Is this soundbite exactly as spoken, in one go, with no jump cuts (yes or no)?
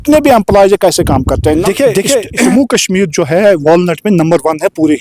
no